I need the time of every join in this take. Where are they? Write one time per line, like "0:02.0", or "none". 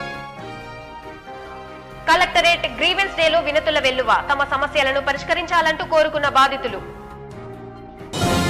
0:01.9